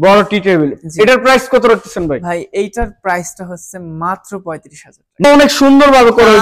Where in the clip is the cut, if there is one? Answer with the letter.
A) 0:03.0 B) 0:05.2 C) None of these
B